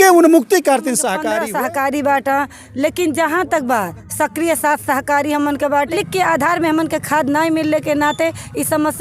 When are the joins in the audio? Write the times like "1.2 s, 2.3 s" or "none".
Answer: 1.1 s, 5.9 s